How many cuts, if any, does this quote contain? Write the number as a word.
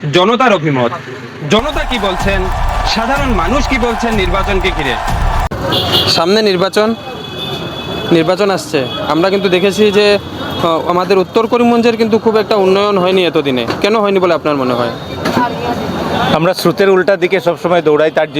one